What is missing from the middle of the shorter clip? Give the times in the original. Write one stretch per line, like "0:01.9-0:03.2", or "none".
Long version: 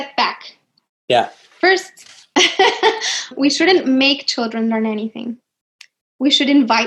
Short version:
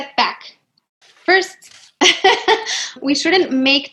0:01.0-0:01.3